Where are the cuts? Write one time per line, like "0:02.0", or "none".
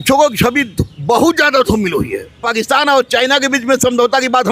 0:02.4